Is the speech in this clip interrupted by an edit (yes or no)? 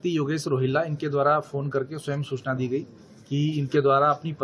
no